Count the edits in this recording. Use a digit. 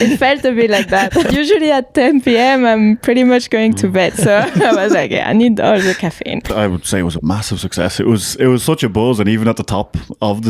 2